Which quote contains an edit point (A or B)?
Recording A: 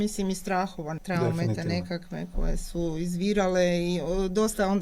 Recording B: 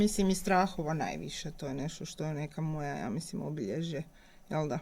A